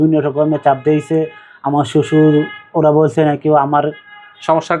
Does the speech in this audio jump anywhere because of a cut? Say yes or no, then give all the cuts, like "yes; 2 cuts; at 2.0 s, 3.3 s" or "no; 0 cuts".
no; 0 cuts